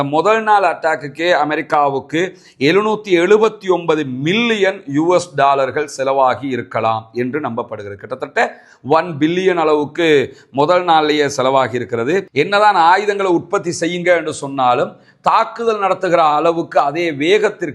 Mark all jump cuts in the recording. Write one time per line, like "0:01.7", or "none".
0:12.3